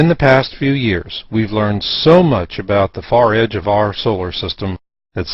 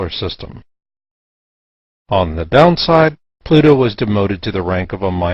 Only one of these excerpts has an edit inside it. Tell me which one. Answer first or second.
first